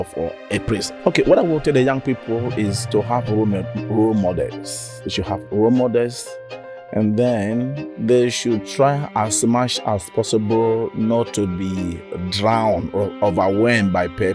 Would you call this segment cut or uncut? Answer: cut